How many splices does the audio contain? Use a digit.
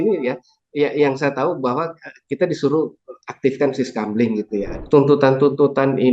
1